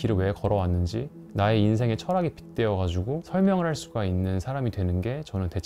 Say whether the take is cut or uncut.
uncut